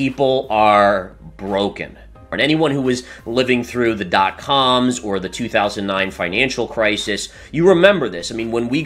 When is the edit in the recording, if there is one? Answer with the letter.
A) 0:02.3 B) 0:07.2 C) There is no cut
A